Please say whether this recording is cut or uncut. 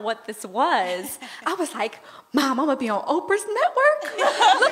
uncut